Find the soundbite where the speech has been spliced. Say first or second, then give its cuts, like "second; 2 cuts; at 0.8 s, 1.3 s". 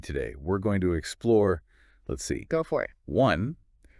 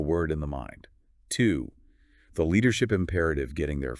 first; 1 cut; at 3.0 s